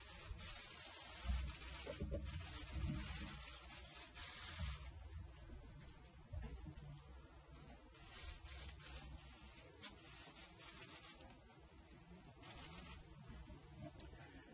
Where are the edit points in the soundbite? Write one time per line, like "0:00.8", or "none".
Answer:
none